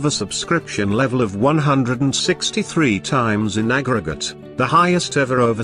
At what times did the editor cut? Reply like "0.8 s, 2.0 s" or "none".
none